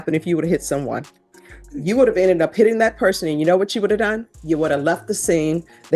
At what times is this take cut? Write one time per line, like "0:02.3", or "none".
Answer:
none